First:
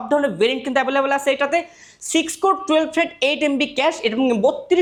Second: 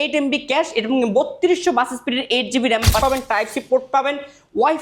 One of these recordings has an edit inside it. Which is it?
second; 1 cut; at 3.0 s

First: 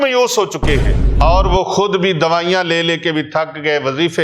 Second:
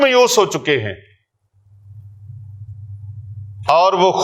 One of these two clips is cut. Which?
first; 1 cut; at 1.0 s

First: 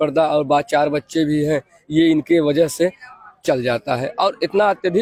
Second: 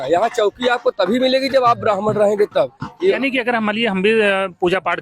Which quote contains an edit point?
second; 1 cut; at 3.2 s

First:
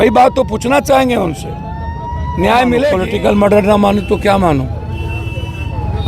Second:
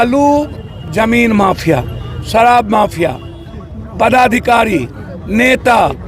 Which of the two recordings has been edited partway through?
first; 1 cut; at 3.0 s

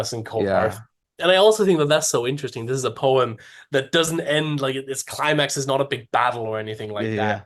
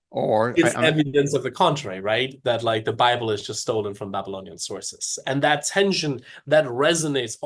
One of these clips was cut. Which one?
first; 1 cut; at 1.0 s

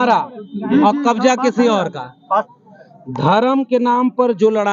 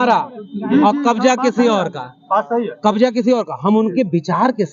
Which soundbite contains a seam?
first; 1 cut; at 2.5 s

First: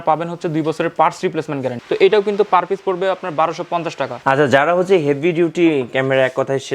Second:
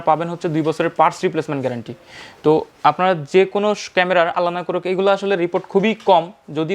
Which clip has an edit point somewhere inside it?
first; 2 cuts; at 1.8 s, 4.2 s

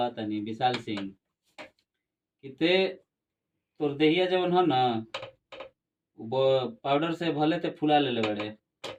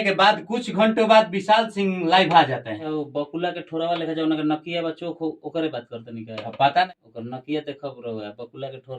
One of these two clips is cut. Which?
second; 2 cuts; at 2.7 s, 6.9 s

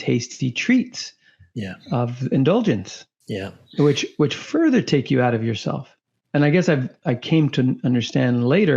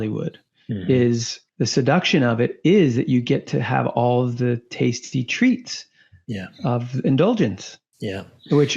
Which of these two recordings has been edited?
second; 1 cut; at 1.4 s

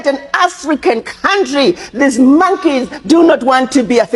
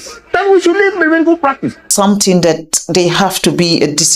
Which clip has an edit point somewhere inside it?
second; 1 cut; at 1.9 s

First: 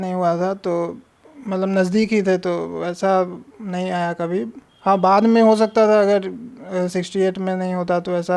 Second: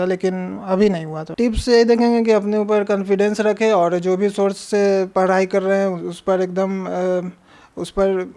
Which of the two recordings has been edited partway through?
second; 1 cut; at 1.2 s

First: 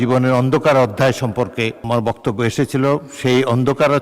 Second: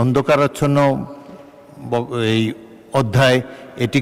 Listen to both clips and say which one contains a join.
first; 1 cut; at 1.8 s

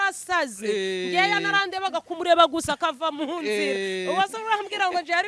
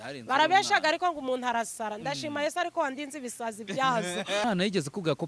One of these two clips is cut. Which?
second; 1 cut; at 4.4 s

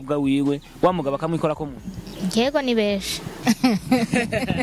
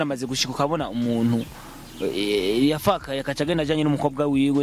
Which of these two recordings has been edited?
first; 1 cut; at 3.3 s

